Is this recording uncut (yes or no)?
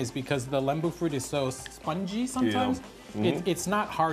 yes